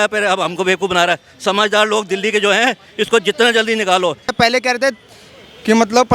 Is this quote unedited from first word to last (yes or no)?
no